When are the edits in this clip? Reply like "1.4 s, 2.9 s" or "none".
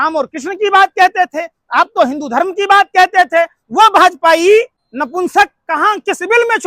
4.8 s

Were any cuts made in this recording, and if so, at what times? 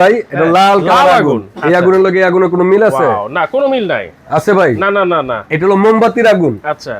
1.5 s

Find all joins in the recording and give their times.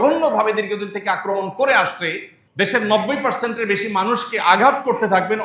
2.4 s

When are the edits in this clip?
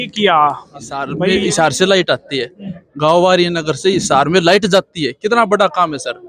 1.1 s

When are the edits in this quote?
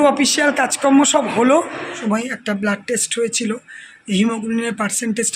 1.9 s

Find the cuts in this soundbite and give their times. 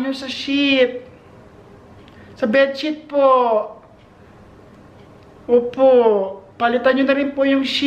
none

